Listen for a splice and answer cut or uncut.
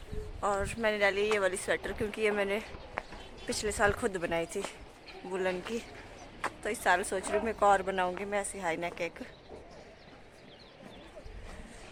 uncut